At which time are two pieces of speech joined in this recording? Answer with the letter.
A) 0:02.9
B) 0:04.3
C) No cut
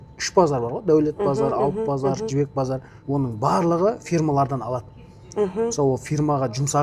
A